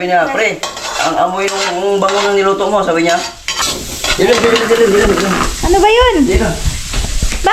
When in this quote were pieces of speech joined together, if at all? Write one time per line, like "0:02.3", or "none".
0:03.4